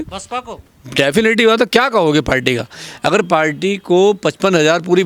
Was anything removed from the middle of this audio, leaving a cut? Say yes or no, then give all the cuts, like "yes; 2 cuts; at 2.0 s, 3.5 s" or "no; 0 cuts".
no; 0 cuts